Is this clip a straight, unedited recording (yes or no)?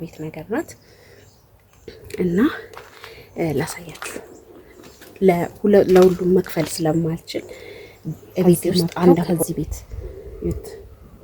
no